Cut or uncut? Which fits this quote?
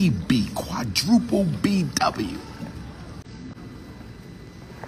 cut